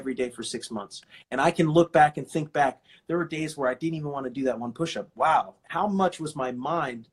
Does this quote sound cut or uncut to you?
cut